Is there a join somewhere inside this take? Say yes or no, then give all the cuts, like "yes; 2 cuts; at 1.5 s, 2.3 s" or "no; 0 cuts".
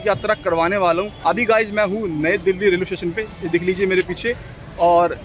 yes; 1 cut; at 1.1 s